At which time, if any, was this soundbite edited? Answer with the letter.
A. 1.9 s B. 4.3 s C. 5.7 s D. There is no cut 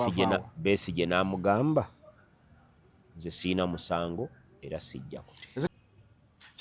C